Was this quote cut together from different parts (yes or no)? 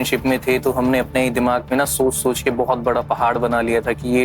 no